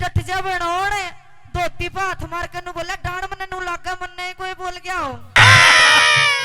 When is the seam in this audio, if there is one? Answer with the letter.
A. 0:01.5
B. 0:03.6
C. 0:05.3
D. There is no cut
C